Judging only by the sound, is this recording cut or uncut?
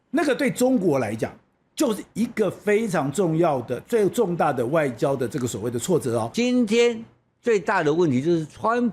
cut